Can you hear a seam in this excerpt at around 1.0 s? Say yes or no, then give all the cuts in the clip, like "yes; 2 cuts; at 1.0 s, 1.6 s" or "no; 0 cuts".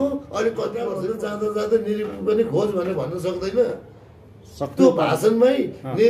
yes; 1 cut; at 1.0 s